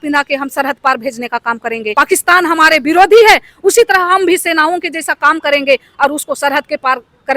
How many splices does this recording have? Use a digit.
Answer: 1